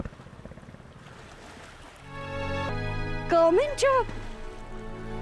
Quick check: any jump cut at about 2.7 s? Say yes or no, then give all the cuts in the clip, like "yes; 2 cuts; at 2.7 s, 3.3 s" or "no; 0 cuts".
yes; 1 cut; at 2.7 s